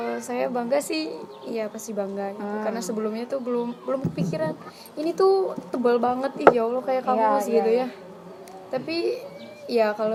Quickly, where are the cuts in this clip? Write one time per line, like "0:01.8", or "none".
none